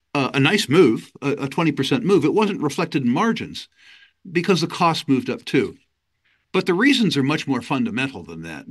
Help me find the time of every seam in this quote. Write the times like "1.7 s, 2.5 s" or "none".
none